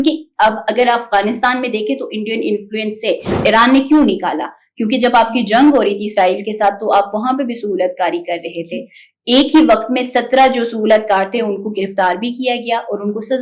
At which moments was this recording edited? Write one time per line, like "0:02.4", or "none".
0:03.3

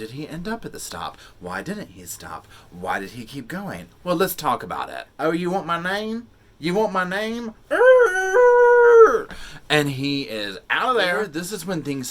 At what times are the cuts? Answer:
0:05.0
0:11.3

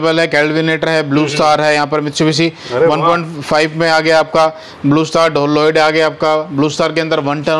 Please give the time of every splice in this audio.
none

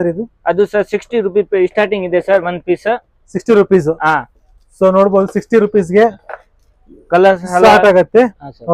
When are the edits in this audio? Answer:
none

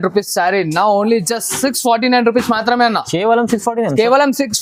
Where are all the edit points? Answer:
none

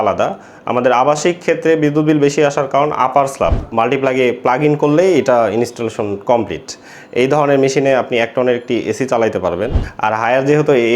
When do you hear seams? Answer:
0:03.6
0:09.8

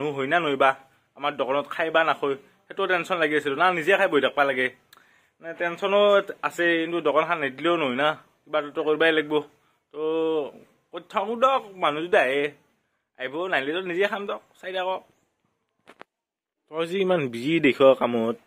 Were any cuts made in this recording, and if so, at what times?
none

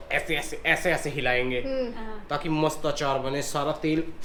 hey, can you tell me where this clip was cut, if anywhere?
none

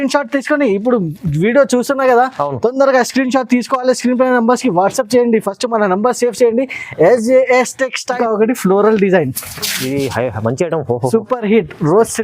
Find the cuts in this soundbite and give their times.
0:08.2

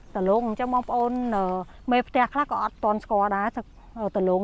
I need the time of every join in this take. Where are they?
none

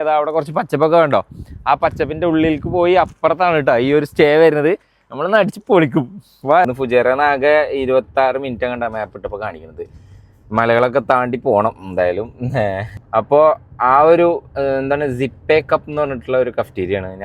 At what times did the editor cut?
0:06.7
0:12.9

